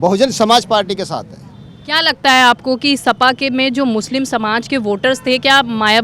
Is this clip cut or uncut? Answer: uncut